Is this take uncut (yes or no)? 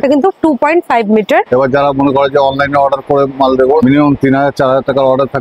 no